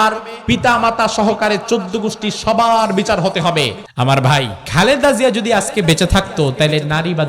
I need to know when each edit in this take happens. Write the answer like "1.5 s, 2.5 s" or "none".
3.8 s, 4.6 s